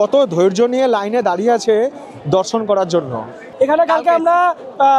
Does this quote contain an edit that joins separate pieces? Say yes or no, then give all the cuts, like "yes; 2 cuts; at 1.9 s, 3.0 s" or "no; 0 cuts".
yes; 1 cut; at 3.4 s